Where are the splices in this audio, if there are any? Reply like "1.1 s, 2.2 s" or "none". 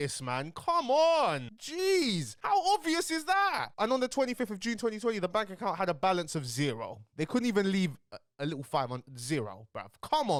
none